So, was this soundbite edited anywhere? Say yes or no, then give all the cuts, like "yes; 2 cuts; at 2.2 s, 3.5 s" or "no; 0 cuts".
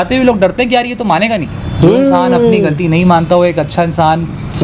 yes; 1 cut; at 1.6 s